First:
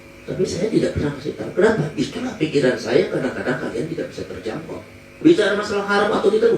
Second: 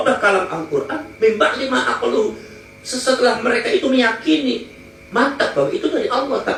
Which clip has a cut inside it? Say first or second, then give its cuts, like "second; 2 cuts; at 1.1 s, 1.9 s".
first; 1 cut; at 5.2 s